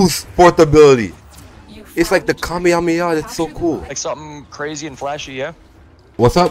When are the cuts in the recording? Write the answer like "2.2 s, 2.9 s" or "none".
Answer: 4.0 s